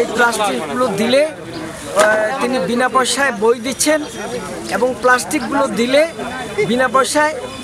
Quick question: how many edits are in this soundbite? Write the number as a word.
zero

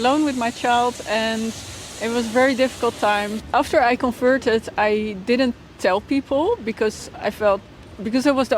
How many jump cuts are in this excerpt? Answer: one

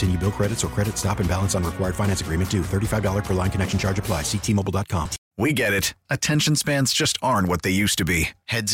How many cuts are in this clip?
one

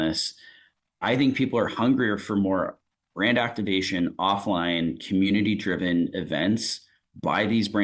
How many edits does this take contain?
zero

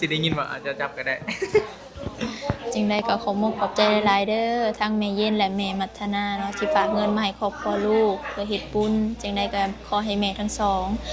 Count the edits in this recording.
zero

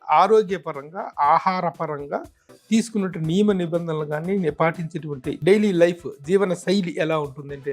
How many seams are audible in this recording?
one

